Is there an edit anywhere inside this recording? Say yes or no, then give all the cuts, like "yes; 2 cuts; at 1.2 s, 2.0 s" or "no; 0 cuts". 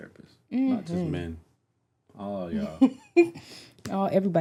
no; 0 cuts